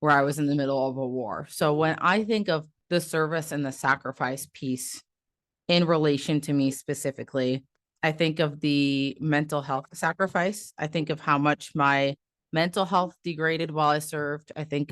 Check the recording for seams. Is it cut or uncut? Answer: cut